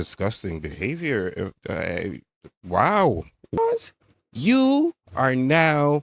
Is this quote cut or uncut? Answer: cut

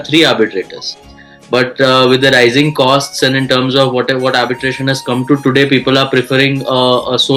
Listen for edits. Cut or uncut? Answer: uncut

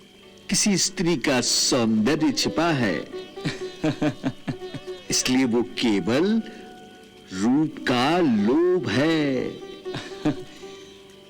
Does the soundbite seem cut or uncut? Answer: uncut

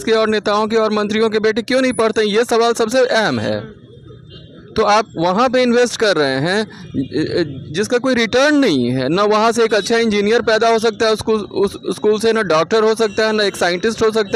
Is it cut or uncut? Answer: uncut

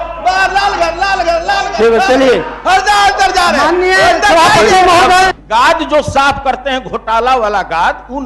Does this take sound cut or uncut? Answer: cut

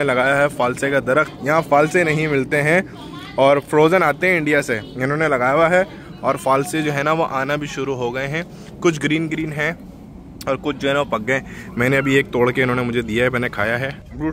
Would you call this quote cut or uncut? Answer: uncut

